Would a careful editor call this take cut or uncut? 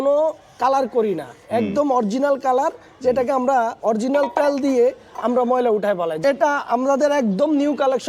cut